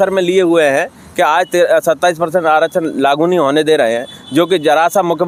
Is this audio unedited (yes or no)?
yes